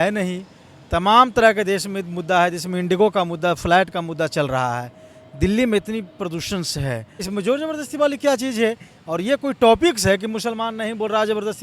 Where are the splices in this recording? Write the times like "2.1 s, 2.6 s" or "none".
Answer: 7.3 s